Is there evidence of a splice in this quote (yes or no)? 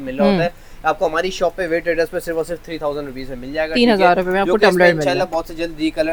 no